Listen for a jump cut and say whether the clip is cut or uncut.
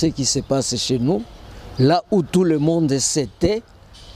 uncut